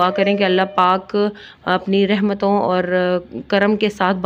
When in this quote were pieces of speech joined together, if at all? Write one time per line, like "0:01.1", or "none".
none